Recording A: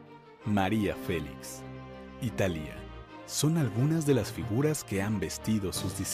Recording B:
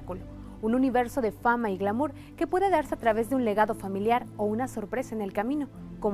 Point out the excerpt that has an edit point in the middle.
B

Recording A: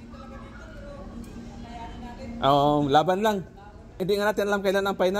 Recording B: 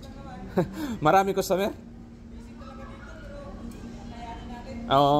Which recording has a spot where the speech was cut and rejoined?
A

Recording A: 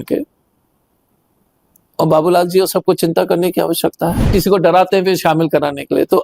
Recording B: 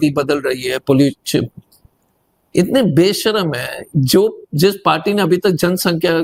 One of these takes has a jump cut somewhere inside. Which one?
A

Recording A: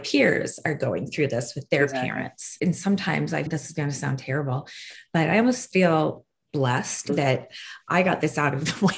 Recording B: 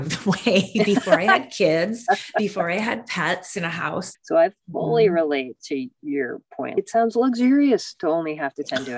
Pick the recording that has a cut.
B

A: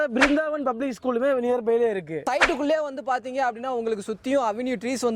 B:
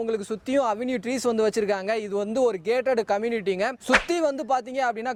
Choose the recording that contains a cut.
A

